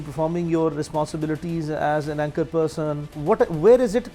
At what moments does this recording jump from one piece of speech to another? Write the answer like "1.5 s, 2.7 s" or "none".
3.1 s